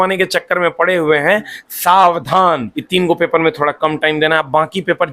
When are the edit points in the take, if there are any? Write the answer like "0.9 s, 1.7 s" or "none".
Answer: 2.7 s